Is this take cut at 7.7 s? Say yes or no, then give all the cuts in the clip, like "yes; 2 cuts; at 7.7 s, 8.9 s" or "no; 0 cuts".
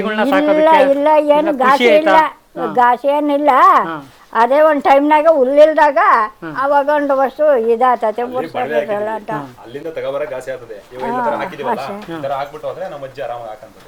no; 0 cuts